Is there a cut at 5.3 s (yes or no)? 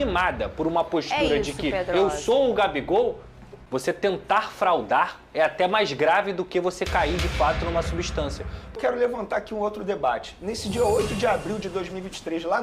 no